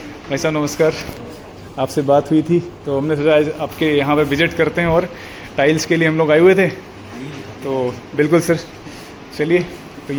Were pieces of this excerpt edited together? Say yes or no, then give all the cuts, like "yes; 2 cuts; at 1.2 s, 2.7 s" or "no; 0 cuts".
no; 0 cuts